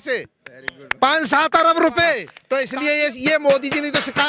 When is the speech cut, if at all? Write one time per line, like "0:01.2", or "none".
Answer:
0:02.3